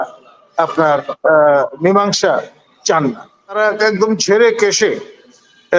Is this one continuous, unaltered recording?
no; 1 cut; at 3.6 s

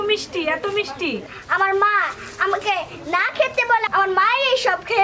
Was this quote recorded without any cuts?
no; 1 cut; at 1.3 s

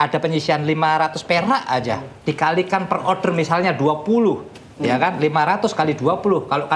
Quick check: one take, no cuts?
yes; 0 cuts

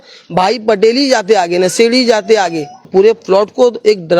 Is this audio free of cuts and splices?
no; 1 cut; at 2.8 s

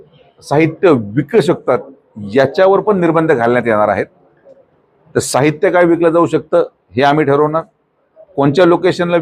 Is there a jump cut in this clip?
no; 0 cuts

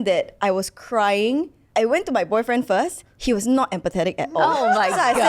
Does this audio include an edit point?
yes; 1 cut; at 1.6 s

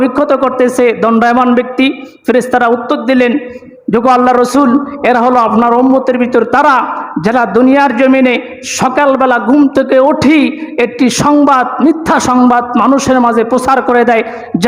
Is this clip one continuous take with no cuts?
yes; 0 cuts

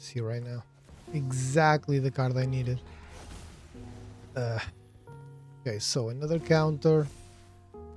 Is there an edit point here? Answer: no; 0 cuts

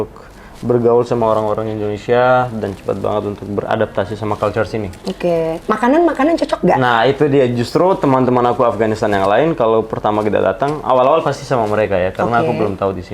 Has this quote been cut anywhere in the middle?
no; 0 cuts

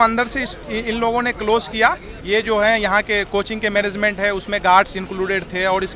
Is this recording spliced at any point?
no; 0 cuts

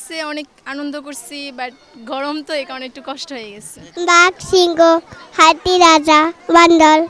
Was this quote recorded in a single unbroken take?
yes; 0 cuts

